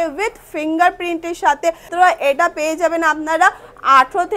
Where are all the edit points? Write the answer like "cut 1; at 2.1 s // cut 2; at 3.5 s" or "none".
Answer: cut 1; at 1.9 s